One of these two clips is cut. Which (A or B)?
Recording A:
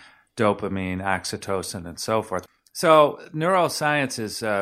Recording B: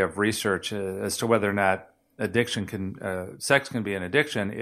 A